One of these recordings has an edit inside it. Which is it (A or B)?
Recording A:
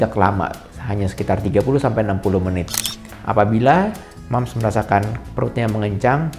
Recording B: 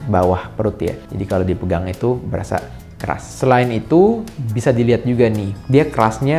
A